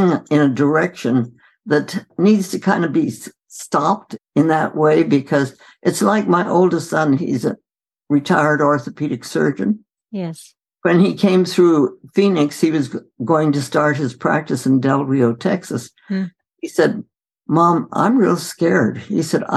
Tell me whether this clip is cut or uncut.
cut